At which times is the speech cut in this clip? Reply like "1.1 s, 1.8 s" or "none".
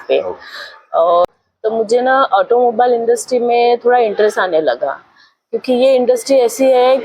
1.2 s